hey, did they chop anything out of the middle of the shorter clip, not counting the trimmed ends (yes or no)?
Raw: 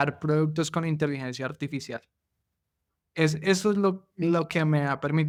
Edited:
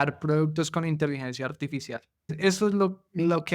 yes